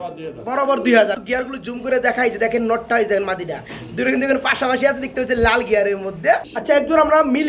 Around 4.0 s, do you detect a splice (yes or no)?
no